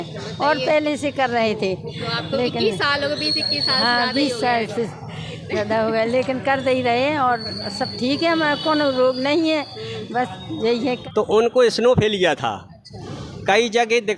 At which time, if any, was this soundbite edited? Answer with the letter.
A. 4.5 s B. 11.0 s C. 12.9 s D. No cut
B